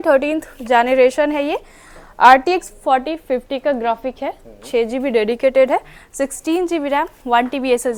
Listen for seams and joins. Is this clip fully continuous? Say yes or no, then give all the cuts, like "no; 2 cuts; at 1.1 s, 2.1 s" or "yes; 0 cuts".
yes; 0 cuts